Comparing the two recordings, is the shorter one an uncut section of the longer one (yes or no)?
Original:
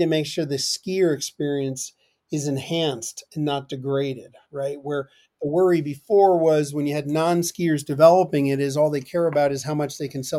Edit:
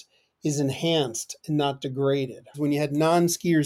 no